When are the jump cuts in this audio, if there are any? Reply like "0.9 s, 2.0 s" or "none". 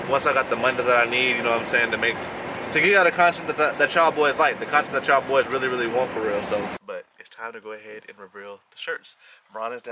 6.8 s